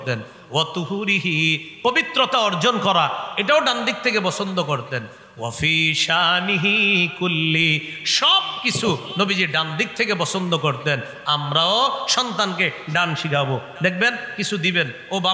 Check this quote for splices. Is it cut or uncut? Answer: uncut